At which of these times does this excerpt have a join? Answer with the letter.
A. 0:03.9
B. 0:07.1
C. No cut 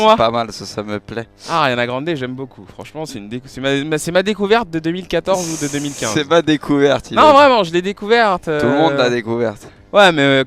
B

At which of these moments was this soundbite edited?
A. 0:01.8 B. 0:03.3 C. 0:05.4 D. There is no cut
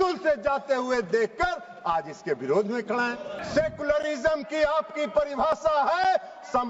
B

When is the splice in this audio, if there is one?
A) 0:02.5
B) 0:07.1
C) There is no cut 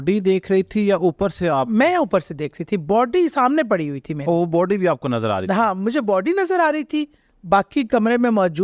C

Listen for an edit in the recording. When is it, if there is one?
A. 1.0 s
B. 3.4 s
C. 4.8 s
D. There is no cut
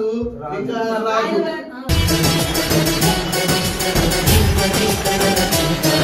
D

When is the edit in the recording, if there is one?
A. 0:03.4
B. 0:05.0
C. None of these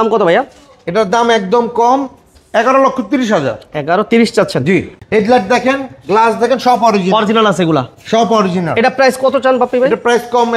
B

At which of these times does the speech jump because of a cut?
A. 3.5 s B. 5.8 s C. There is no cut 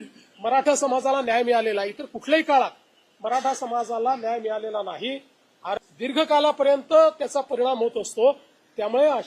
B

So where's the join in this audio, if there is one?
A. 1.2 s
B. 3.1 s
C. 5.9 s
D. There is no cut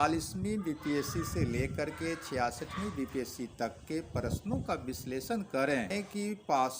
C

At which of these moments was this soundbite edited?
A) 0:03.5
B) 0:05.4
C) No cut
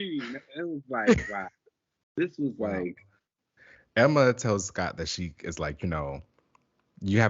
A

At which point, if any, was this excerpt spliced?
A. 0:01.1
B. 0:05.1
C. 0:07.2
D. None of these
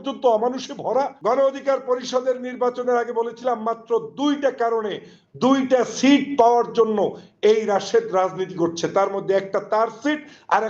A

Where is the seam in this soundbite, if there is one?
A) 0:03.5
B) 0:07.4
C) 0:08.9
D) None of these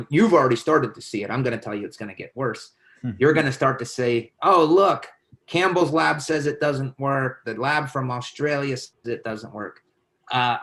C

